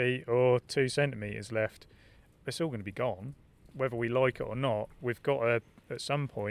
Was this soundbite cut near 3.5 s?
no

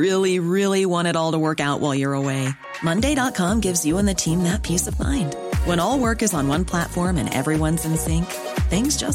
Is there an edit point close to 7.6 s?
no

